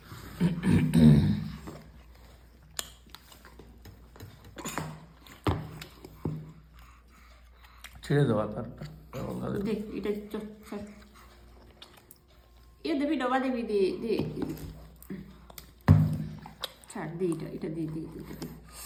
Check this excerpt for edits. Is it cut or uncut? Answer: uncut